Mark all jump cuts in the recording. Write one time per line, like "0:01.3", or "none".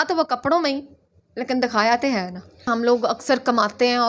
0:02.7